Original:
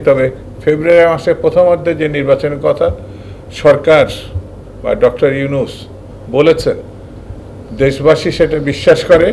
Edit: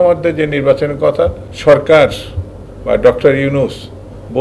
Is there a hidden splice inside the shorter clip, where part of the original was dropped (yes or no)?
yes